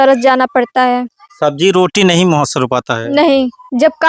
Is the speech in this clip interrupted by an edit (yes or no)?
no